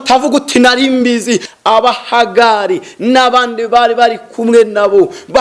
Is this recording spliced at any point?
yes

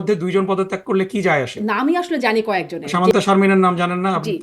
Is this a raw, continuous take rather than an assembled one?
no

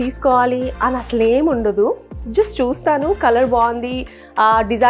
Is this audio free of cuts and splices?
yes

